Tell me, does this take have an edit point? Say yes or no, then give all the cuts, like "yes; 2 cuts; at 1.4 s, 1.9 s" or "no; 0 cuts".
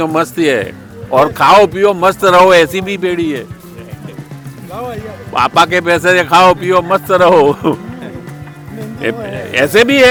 no; 0 cuts